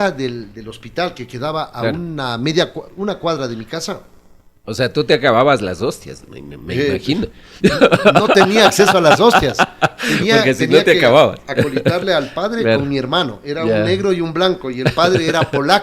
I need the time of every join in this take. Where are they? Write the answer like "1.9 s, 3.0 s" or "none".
none